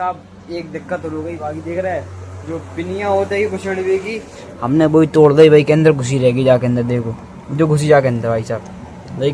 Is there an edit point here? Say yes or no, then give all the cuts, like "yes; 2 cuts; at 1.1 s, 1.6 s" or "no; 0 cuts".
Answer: yes; 1 cut; at 1.0 s